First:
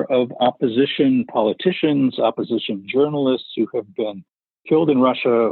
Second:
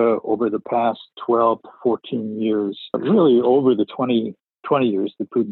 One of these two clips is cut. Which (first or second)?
second